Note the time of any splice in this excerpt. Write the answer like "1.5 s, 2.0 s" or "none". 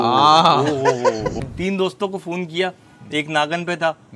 1.4 s